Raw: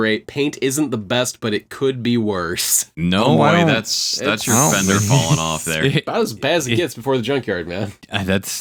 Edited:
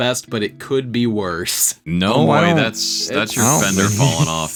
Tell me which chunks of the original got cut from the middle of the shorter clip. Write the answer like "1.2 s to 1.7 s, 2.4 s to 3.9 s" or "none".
none